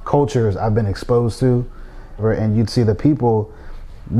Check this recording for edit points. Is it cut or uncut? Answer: cut